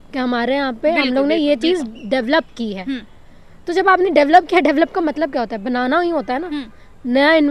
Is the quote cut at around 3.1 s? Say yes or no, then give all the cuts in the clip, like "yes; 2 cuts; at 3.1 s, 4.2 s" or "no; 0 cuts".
no; 0 cuts